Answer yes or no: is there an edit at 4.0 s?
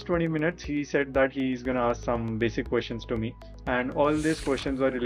no